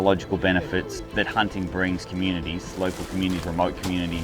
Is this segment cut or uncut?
cut